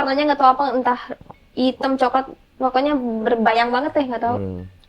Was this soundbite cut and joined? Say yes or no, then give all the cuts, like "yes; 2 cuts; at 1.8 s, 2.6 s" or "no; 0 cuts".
no; 0 cuts